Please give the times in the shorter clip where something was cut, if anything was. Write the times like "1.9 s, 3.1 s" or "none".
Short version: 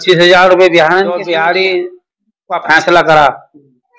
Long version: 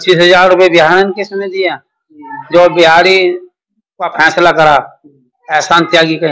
1.2 s